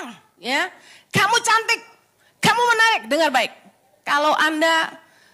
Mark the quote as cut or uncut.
cut